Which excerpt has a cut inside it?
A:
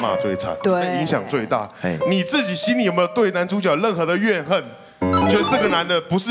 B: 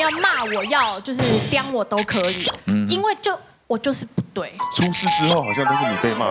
B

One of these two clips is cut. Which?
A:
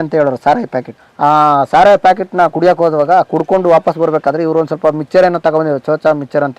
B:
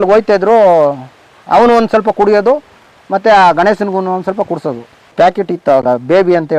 B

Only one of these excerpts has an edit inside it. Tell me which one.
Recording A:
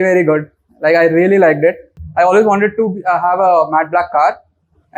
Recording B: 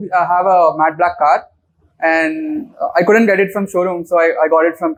A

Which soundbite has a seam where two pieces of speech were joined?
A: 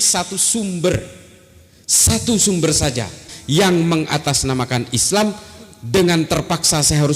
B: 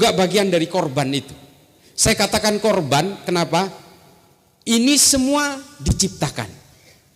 A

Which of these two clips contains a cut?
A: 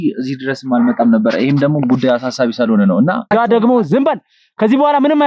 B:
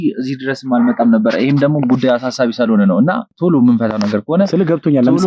A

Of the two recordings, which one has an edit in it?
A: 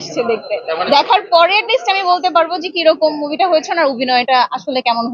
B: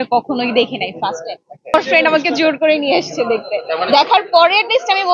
B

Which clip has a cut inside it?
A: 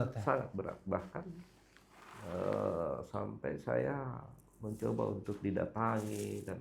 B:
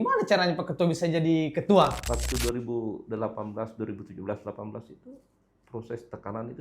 B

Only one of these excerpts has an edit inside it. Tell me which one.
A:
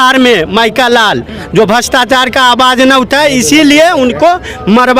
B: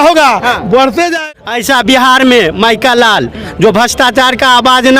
B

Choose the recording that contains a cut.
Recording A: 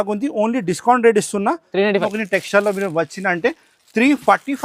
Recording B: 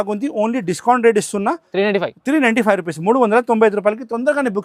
A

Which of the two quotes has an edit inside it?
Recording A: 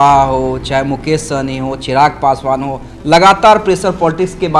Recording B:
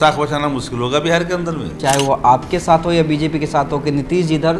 B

